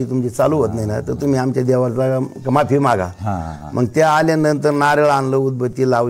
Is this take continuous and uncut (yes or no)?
yes